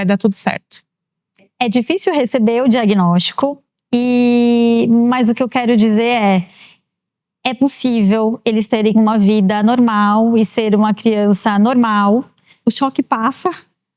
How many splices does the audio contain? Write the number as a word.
two